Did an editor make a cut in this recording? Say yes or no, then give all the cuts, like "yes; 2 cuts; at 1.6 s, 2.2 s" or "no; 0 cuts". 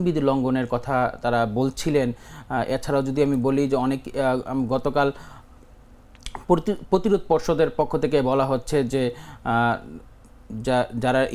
no; 0 cuts